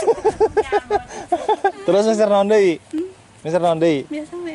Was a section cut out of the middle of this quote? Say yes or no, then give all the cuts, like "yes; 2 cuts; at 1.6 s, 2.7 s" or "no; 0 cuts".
no; 0 cuts